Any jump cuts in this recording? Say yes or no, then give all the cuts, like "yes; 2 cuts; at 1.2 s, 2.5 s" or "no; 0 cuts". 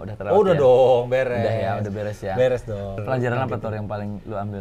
yes; 1 cut; at 2.9 s